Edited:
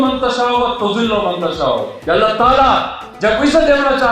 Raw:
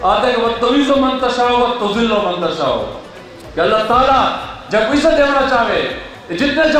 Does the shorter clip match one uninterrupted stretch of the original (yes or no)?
no